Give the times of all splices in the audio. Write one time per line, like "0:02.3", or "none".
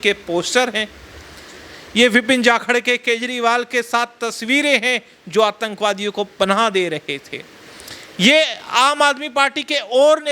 none